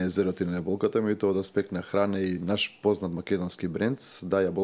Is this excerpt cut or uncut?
uncut